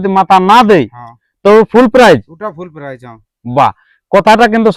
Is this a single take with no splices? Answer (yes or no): yes